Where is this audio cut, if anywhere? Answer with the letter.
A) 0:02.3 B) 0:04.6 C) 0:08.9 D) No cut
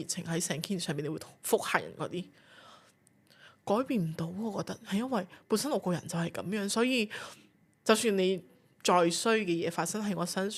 D